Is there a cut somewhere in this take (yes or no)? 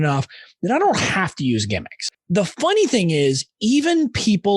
yes